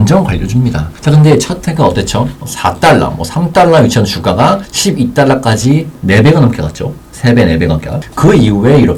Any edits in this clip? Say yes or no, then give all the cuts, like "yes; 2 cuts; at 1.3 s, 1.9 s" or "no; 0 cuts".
no; 0 cuts